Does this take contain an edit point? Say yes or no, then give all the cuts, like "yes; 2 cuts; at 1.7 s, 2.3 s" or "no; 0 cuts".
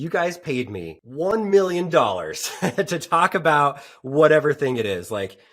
yes; 1 cut; at 1.0 s